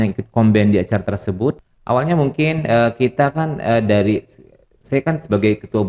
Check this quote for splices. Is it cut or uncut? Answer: cut